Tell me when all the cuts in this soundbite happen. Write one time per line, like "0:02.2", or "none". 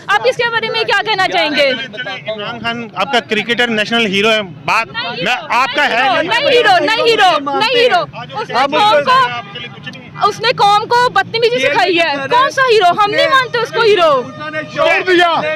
none